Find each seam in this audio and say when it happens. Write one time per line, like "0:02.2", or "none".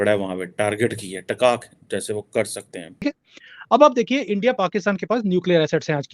0:03.0